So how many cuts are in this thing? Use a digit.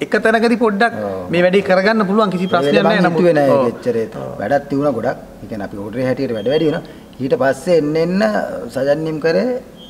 1